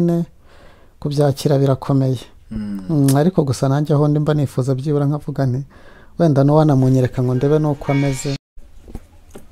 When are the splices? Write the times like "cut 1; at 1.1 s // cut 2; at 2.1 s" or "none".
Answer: none